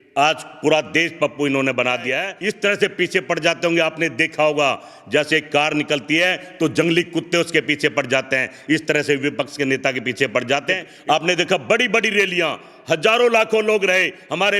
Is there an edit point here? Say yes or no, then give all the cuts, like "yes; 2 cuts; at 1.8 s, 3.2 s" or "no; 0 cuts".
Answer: yes; 2 cuts; at 2.3 s, 10.9 s